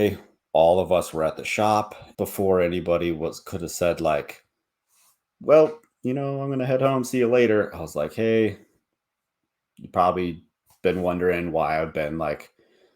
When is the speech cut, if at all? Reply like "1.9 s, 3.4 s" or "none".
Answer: 2.0 s